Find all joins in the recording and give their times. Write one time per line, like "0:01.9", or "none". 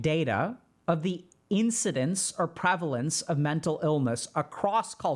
none